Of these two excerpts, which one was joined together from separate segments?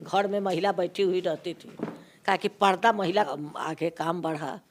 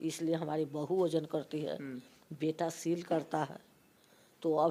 first; 1 cut; at 3.3 s

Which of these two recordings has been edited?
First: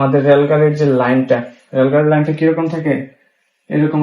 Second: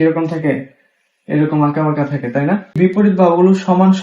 second; 1 cut; at 2.8 s

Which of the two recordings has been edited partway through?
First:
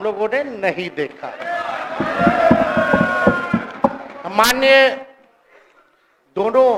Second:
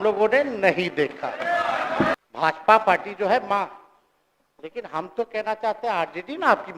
second; 1 cut; at 2.1 s

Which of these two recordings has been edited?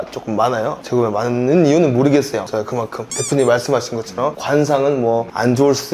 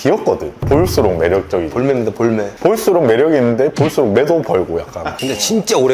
second; 2 cuts; at 2.5 s, 5.1 s

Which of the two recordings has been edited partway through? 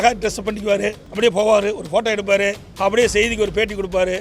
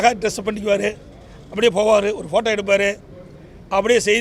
first; 2 cuts; at 1.0 s, 2.7 s

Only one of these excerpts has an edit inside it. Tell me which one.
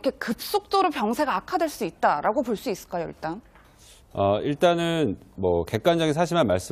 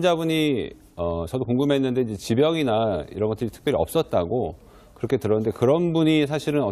second; 1 cut; at 3.4 s

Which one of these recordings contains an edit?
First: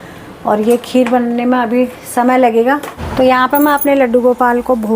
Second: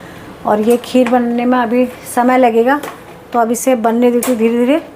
first; 1 cut; at 3.0 s

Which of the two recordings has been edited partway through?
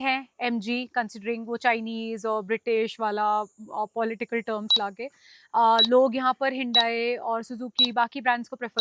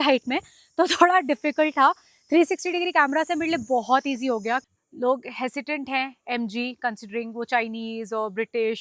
second; 1 cut; at 4.7 s

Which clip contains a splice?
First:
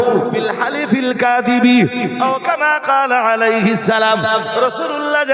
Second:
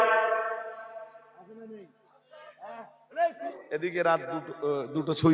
second; 1 cut; at 3.4 s

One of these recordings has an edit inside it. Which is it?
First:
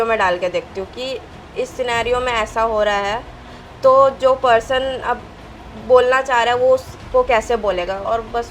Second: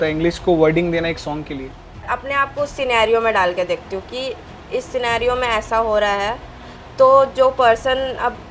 second; 1 cut; at 2.1 s

